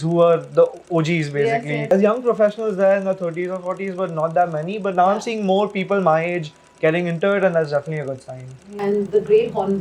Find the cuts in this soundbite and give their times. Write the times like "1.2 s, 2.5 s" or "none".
1.9 s, 8.6 s